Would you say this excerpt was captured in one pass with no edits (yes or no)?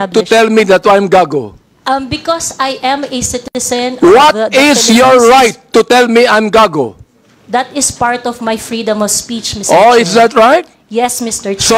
yes